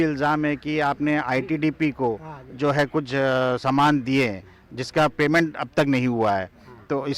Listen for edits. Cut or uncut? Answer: uncut